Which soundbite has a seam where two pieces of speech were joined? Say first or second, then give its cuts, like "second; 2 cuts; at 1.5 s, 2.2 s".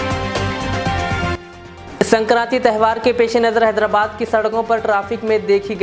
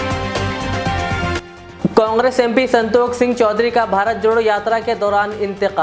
first; 1 cut; at 1.3 s